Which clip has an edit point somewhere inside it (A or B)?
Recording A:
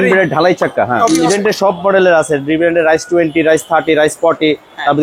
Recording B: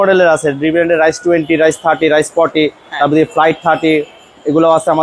A